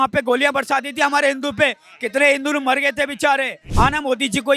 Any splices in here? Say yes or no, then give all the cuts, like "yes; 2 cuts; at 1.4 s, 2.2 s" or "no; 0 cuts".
yes; 1 cut; at 3.6 s